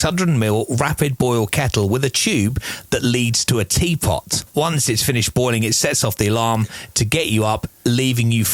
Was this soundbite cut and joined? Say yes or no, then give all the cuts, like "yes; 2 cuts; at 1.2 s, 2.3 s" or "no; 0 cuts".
yes; 1 cut; at 4.5 s